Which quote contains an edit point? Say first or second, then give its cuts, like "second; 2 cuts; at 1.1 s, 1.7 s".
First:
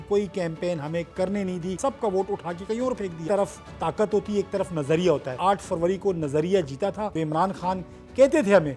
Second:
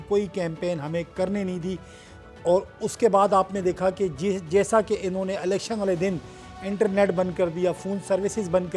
first; 4 cuts; at 1.8 s, 3.2 s, 5.4 s, 7.1 s